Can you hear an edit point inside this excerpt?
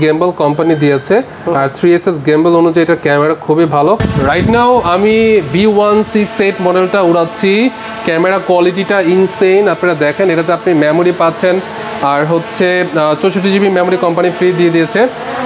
no; 0 cuts

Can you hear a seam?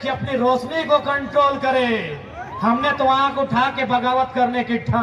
no; 0 cuts

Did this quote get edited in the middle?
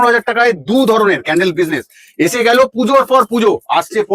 no; 0 cuts

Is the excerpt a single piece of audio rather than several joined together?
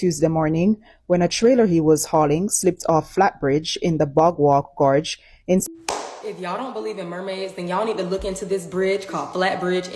no; 1 cut; at 5.6 s

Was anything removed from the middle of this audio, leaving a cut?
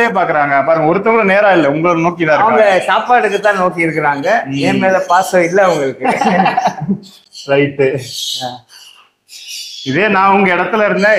no; 0 cuts

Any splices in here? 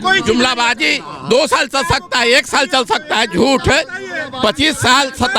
no; 0 cuts

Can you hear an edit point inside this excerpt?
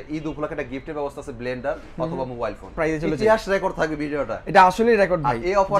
yes; 1 cut; at 2.7 s

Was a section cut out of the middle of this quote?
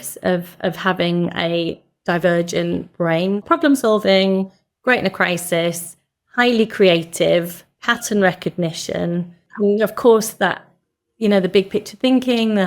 yes; 2 cuts; at 3.4 s, 9.4 s

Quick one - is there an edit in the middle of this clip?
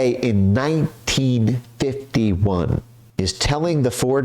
yes; 1 cut; at 3.0 s

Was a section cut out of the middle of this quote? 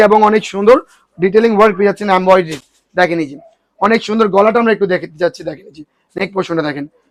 no; 0 cuts

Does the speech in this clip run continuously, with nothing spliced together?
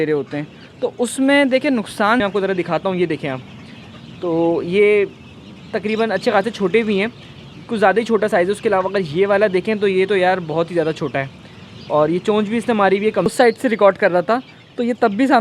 no; 2 cuts; at 2.2 s, 13.3 s

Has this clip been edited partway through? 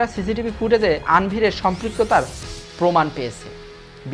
no; 0 cuts

